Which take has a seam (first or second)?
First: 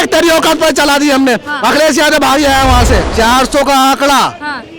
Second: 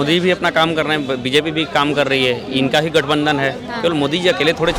first